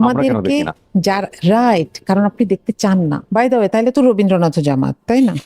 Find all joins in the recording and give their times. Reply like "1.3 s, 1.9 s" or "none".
3.2 s